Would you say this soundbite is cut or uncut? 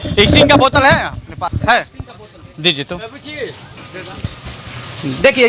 cut